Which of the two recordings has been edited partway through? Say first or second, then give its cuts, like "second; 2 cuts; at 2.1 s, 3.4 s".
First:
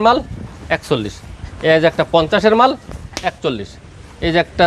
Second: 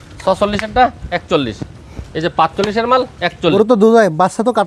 second; 1 cut; at 3.5 s